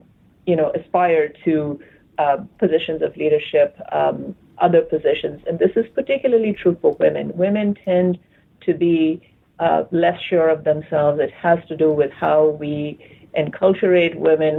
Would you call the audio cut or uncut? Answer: uncut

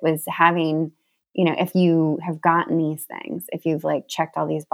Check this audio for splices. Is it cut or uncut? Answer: uncut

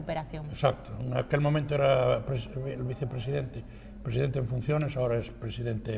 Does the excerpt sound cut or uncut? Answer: uncut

